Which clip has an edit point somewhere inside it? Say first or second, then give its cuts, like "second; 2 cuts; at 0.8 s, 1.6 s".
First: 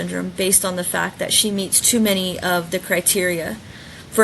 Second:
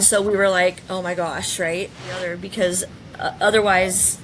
second; 1 cut; at 2.3 s